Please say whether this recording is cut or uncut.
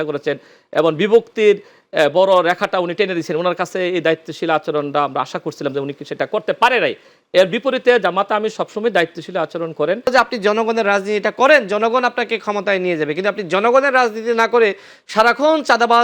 cut